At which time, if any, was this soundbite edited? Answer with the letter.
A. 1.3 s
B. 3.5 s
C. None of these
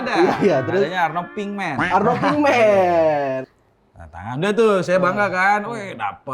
B